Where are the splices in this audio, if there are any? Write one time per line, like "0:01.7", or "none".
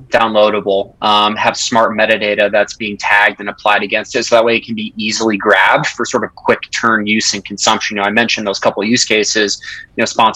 none